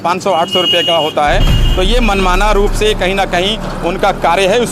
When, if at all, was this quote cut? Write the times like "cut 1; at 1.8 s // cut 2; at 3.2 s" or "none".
none